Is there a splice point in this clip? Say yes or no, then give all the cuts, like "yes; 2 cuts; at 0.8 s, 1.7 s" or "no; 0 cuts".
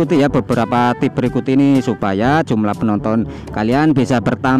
no; 0 cuts